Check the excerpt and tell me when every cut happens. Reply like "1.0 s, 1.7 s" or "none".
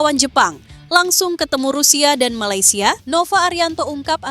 3.0 s